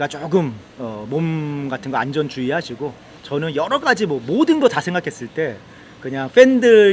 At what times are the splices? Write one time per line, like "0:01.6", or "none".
0:03.1